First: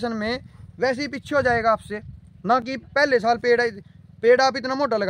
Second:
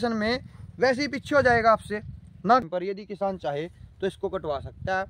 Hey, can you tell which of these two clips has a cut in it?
second; 1 cut; at 2.7 s

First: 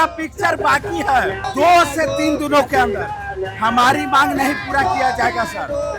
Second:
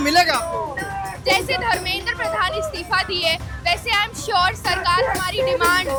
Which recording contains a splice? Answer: first; 1 cut; at 1.5 s

